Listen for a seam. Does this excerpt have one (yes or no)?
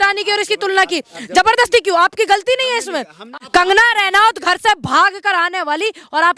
yes